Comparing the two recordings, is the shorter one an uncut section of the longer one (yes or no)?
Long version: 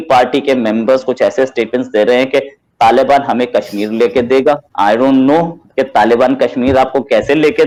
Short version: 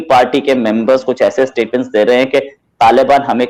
yes